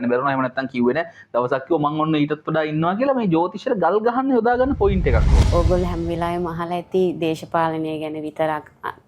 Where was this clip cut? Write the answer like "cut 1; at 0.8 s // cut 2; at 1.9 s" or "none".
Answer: cut 1; at 5.4 s